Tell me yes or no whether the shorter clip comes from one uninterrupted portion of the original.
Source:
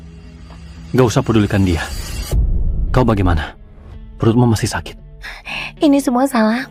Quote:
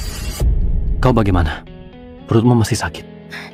yes